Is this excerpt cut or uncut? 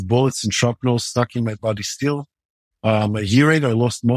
uncut